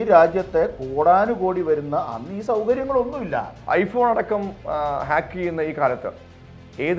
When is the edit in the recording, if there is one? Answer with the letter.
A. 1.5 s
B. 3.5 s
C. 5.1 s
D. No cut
B